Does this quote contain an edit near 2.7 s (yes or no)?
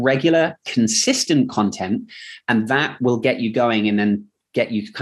no